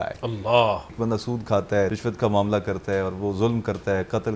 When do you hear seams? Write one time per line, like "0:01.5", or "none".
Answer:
0:00.9
0:01.9